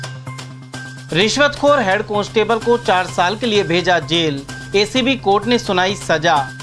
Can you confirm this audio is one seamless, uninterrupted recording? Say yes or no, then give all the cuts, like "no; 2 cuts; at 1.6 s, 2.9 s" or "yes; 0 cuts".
no; 1 cut; at 0.9 s